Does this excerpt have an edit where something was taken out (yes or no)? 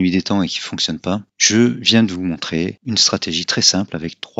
yes